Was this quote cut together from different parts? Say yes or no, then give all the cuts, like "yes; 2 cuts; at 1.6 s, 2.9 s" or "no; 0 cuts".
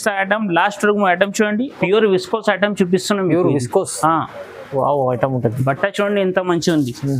yes; 1 cut; at 1.7 s